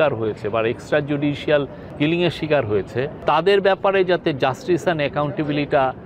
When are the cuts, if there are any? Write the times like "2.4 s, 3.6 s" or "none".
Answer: 1.8 s, 3.1 s